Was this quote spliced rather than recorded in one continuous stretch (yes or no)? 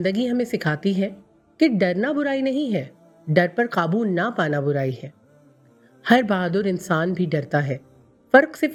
no